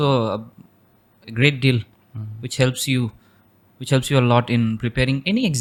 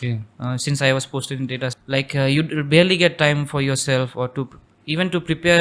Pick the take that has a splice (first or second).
second